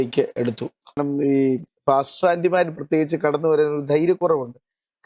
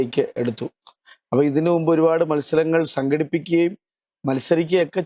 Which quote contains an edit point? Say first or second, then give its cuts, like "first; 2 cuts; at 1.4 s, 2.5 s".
first; 1 cut; at 1.0 s